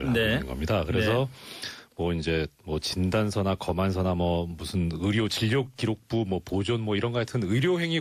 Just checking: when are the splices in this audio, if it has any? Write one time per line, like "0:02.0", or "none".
none